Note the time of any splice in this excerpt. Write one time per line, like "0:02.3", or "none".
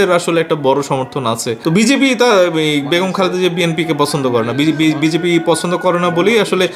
none